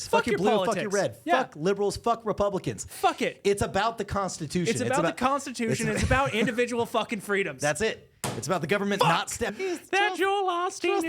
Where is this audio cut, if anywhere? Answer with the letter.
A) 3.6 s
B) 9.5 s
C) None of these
B